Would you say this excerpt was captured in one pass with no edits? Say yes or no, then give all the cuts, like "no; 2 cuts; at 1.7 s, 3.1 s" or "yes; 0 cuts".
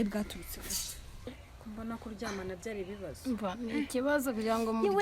no; 1 cut; at 1.3 s